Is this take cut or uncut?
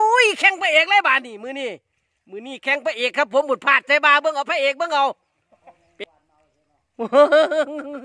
cut